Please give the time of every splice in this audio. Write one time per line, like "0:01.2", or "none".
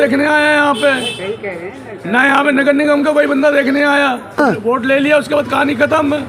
0:04.4